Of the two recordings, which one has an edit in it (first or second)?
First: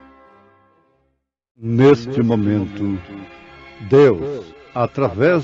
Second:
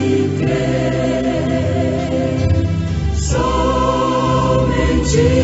first